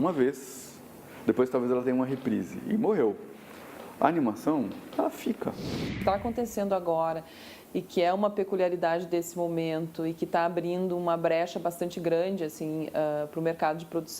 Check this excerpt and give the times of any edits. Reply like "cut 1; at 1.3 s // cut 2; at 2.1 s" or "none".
cut 1; at 6.0 s